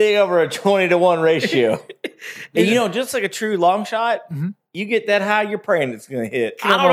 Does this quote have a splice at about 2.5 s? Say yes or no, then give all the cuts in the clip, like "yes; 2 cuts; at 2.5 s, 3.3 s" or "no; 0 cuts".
yes; 1 cut; at 2.5 s